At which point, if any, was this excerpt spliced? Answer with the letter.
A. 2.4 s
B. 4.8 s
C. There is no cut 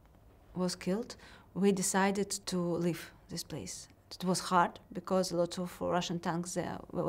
A